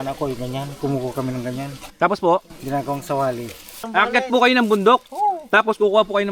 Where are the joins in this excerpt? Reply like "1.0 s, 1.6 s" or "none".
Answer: 3.7 s